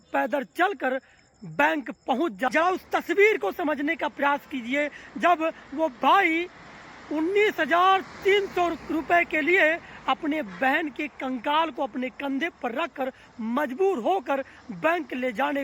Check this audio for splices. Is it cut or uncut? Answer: cut